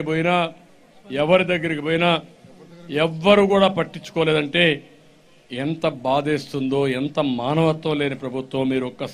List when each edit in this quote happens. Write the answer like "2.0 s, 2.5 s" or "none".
none